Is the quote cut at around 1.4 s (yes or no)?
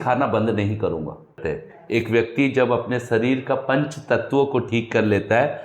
yes